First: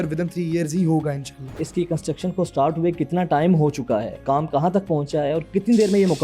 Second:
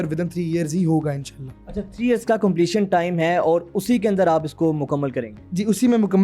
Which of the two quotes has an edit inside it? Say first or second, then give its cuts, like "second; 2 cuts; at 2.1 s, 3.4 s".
first; 2 cuts; at 1.6 s, 4.2 s